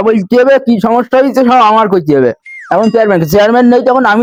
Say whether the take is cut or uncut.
uncut